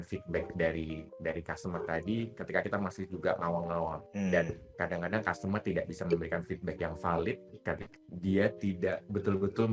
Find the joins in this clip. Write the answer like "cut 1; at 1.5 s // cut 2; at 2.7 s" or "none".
cut 1; at 1.1 s // cut 2; at 4.0 s // cut 3; at 7.9 s